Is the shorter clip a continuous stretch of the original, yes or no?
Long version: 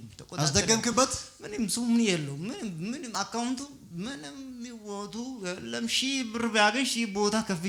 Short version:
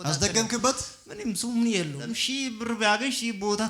no